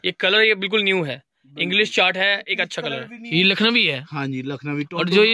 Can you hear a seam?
yes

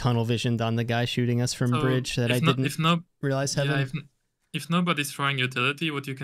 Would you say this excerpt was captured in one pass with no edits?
yes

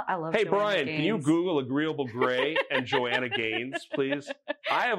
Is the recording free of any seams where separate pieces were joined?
yes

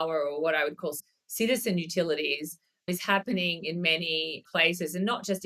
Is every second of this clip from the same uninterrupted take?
no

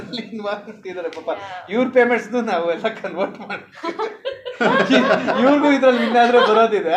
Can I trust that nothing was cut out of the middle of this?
yes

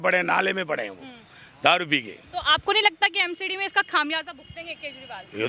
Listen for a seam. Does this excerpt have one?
no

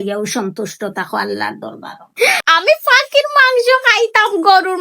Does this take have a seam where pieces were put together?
yes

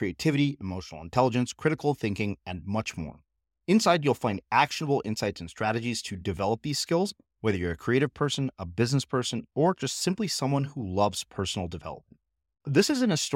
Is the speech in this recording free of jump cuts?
yes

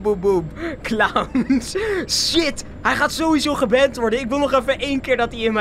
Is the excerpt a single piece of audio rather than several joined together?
yes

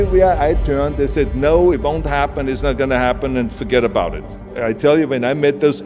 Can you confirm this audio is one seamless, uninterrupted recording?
no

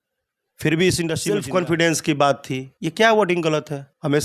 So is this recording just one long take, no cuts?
no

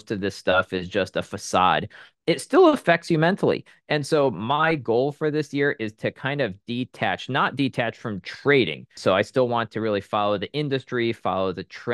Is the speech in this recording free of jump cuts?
no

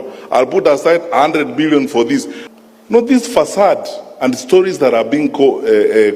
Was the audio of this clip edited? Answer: yes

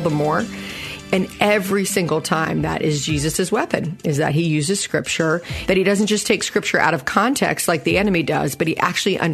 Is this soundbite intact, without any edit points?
no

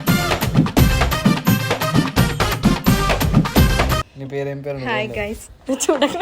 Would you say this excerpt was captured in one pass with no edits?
no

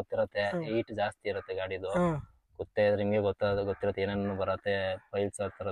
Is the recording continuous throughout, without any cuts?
yes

